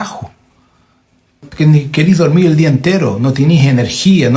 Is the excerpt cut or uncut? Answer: cut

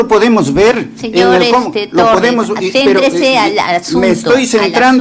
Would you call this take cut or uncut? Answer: uncut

